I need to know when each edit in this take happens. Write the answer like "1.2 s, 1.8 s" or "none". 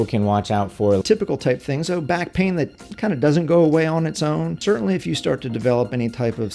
1.0 s, 4.6 s